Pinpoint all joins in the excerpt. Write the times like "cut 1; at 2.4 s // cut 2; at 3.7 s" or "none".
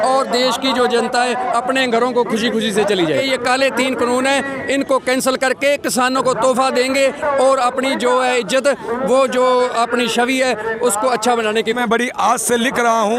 cut 1; at 3.1 s // cut 2; at 11.8 s